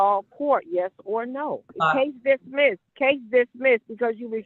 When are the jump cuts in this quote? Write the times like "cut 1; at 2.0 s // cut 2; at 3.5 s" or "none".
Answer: cut 1; at 1.7 s // cut 2; at 2.9 s